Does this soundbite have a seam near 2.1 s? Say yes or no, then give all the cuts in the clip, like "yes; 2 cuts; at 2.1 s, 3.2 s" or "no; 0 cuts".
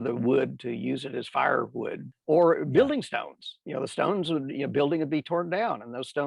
yes; 1 cut; at 2.1 s